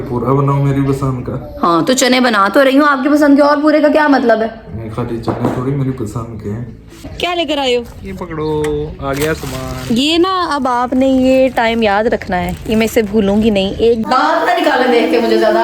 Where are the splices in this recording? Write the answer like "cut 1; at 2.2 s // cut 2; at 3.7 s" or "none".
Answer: cut 1; at 1.5 s // cut 2; at 7.1 s // cut 3; at 14.0 s